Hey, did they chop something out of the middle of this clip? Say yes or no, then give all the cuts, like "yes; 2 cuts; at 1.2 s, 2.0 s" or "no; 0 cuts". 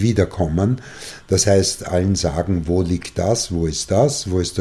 no; 0 cuts